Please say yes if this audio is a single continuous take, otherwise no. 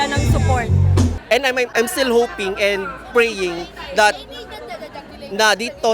no